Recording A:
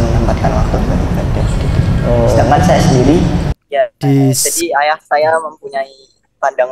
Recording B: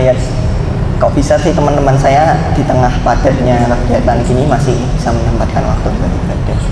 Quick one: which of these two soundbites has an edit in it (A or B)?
A